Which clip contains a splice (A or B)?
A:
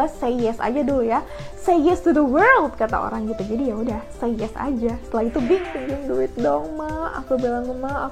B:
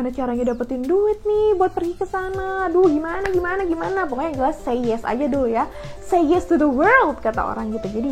A